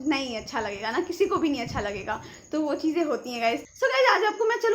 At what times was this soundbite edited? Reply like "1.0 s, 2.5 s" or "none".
3.6 s